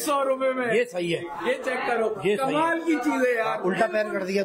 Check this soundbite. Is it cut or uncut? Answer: uncut